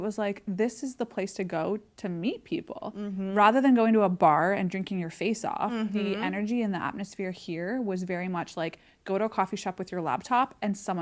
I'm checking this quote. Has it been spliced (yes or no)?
no